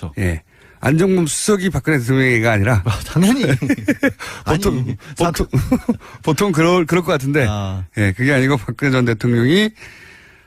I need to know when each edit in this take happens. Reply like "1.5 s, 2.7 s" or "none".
4.4 s